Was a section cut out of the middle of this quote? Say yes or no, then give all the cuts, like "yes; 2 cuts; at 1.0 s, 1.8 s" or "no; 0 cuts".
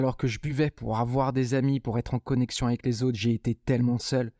no; 0 cuts